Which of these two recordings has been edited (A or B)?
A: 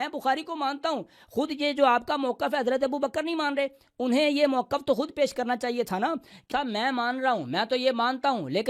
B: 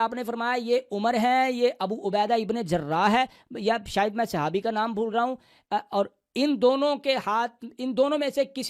A